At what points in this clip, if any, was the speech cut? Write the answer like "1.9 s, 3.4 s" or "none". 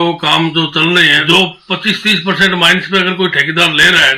1.2 s